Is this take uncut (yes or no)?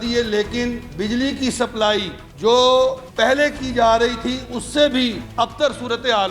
no